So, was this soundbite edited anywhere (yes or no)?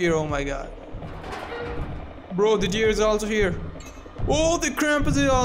no